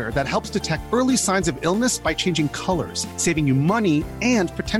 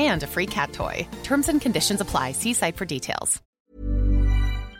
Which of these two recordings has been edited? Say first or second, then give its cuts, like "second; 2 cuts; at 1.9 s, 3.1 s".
second; 1 cut; at 3.4 s